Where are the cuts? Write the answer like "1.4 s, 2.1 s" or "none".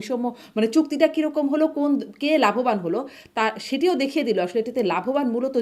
none